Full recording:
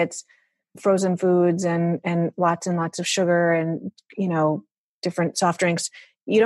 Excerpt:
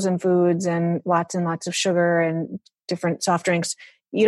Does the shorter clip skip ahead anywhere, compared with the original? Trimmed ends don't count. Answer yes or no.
yes